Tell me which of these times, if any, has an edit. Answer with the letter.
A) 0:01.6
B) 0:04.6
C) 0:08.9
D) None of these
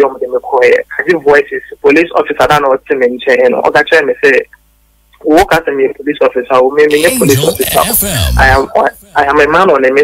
A